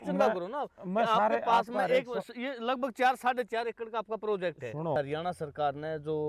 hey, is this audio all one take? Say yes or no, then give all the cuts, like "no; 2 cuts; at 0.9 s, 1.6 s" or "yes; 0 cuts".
no; 1 cut; at 5.0 s